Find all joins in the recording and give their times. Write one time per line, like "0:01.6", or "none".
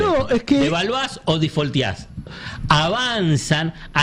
0:02.4